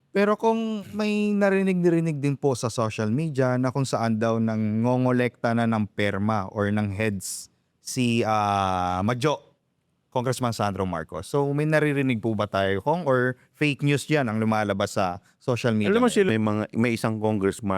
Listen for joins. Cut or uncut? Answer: cut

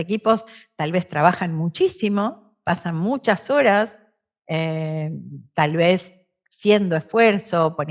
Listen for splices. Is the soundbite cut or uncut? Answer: uncut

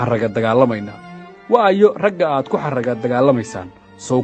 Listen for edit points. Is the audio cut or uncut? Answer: uncut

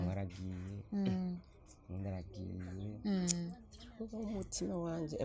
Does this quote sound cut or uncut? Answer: uncut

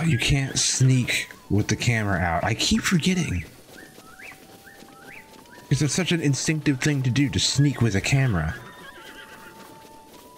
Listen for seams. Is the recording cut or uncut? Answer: uncut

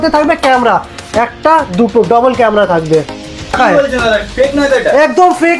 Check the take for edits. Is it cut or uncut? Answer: cut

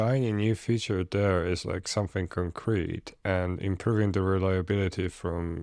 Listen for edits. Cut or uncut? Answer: uncut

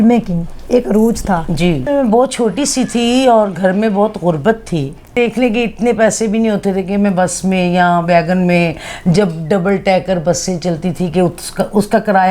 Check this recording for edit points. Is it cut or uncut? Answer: cut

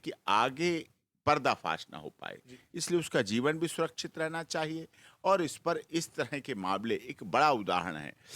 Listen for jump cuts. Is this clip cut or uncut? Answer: uncut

